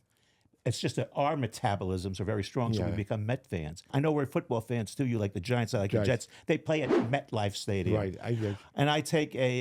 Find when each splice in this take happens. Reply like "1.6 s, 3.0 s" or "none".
3.9 s